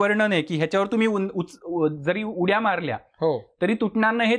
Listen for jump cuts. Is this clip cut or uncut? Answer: uncut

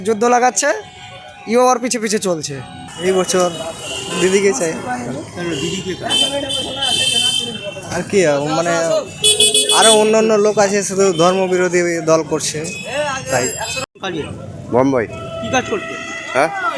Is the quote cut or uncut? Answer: cut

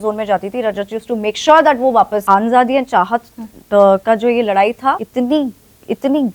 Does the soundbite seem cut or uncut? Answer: cut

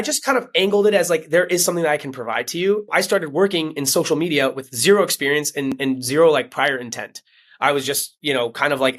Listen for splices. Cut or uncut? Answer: cut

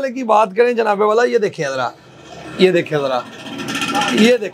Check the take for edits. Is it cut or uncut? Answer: uncut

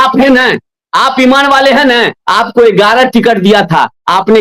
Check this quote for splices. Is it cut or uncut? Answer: uncut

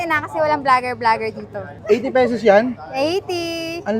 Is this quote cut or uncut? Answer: cut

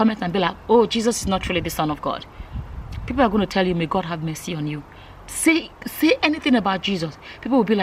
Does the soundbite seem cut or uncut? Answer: uncut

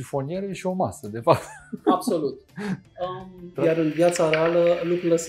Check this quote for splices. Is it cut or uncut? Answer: cut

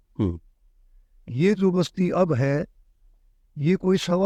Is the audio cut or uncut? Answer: uncut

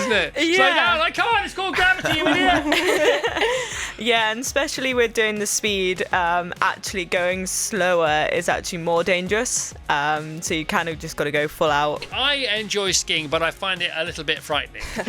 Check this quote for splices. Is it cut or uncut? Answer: cut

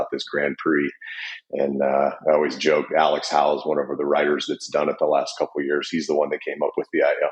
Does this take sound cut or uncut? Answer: uncut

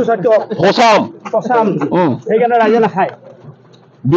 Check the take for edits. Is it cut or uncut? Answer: uncut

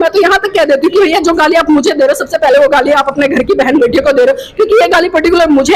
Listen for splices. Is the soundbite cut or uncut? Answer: uncut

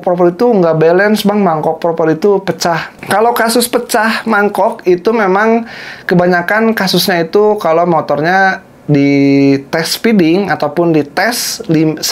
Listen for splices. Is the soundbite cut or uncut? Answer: uncut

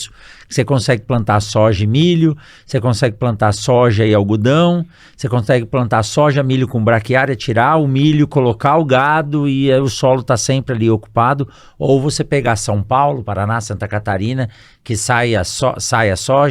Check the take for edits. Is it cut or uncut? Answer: uncut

